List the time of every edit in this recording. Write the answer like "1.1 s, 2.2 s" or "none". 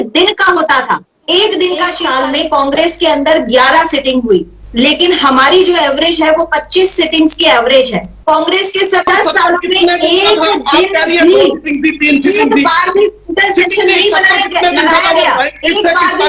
2.0 s, 8.2 s, 9.1 s

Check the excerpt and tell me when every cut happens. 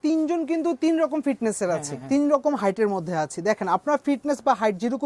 none

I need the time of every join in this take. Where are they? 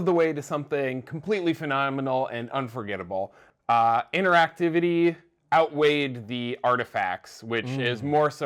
3.4 s

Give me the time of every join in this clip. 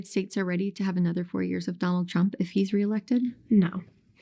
none

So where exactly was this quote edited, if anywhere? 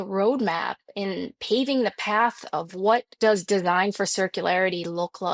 none

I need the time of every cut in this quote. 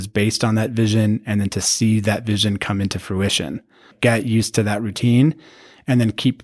3.9 s

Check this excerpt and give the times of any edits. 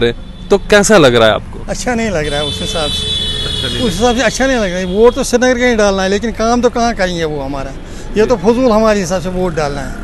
none

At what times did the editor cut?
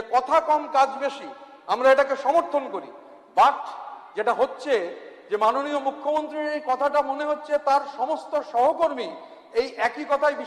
none

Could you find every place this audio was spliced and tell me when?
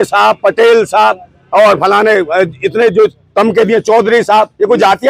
none

